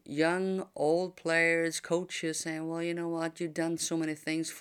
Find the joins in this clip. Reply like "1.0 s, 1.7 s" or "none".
none